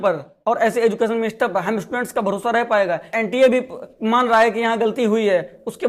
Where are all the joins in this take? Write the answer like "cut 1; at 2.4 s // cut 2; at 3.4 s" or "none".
cut 1; at 3.1 s